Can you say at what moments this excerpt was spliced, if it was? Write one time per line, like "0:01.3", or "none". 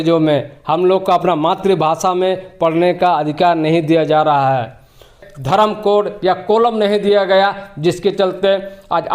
0:05.3